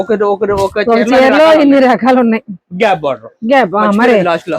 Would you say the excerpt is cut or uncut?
uncut